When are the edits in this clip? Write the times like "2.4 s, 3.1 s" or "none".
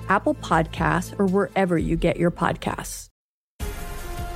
2.9 s